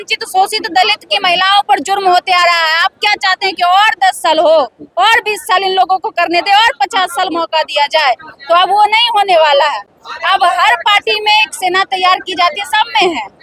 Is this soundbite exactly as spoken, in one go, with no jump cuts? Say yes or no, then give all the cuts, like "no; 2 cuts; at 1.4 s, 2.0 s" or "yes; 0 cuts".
yes; 0 cuts